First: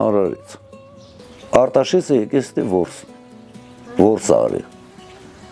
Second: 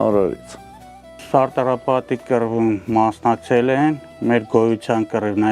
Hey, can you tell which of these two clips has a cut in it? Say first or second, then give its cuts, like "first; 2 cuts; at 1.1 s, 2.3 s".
second; 1 cut; at 1.1 s